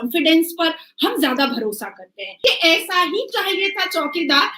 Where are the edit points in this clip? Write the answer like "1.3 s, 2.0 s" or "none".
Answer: 2.3 s

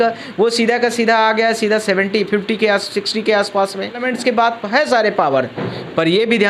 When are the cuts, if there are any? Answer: 4.1 s

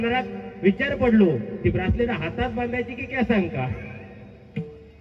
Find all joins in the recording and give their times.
none

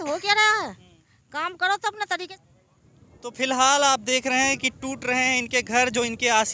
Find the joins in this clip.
2.3 s

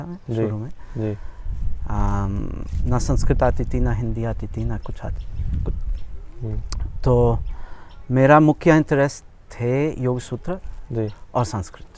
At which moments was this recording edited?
none

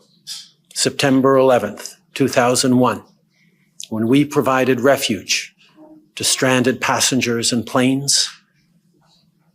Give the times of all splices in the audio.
none

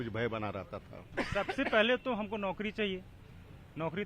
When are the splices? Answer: 1.0 s

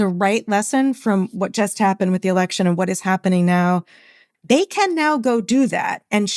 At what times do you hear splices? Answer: none

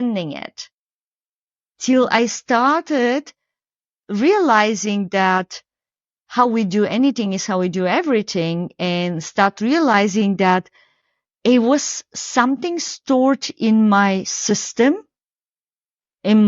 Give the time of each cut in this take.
none

